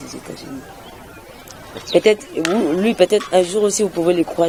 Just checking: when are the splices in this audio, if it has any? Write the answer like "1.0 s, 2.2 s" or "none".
none